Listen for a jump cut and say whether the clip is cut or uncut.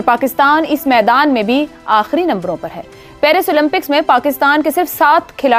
uncut